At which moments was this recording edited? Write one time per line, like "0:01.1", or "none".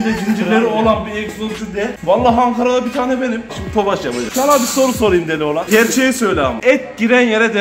0:04.0
0:05.7
0:06.6